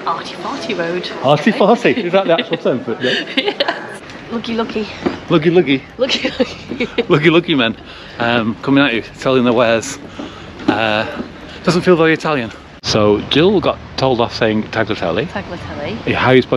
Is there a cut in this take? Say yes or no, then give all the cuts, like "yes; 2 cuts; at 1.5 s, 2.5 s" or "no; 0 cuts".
yes; 2 cuts; at 4.1 s, 13.0 s